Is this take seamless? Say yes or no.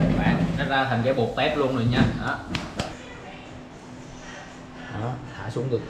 no